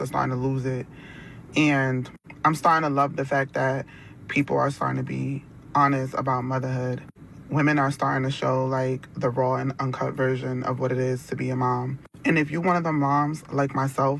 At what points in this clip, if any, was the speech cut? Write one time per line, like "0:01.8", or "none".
none